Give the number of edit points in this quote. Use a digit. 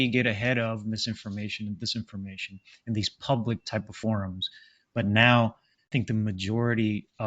1